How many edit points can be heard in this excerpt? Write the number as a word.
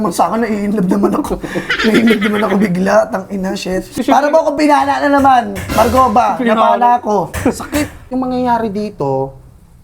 two